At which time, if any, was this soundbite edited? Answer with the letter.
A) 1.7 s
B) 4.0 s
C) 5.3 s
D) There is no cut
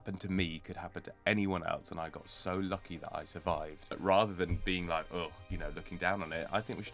B